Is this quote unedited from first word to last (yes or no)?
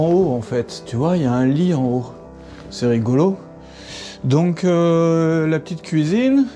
yes